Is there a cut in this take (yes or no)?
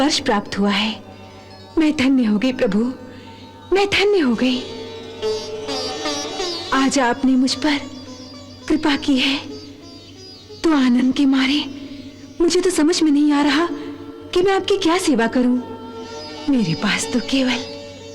no